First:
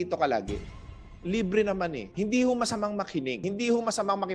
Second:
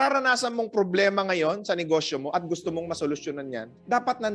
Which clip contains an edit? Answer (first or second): first